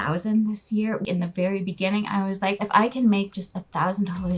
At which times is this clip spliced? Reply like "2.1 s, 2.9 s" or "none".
1.0 s